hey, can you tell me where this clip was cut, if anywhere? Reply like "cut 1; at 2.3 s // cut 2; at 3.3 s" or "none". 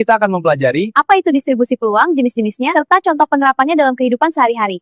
none